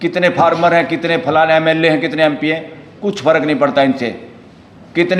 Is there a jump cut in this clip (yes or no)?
no